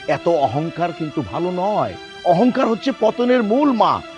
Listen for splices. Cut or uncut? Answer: uncut